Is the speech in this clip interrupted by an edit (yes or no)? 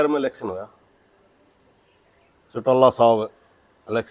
no